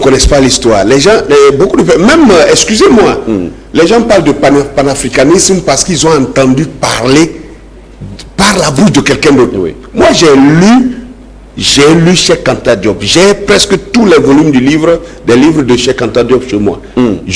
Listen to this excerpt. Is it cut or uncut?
uncut